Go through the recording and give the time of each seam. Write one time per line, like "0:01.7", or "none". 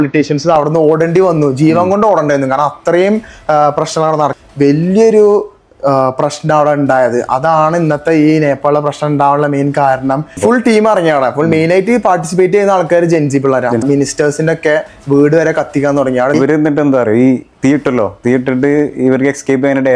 0:04.4
0:10.3
0:13.8
0:16.3